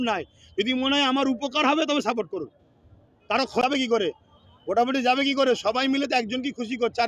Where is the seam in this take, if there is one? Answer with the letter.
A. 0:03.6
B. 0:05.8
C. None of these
A